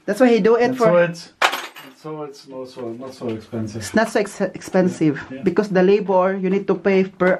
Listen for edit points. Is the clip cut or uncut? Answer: uncut